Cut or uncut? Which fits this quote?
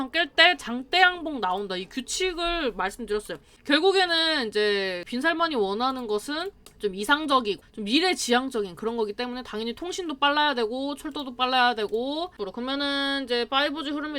cut